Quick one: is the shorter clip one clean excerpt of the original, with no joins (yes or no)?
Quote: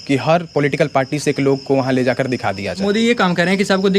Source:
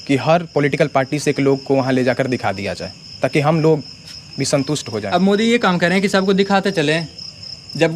no